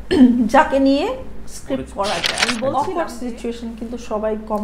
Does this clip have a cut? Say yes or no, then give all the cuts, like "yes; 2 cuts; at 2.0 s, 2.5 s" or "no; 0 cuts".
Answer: yes; 1 cut; at 2.7 s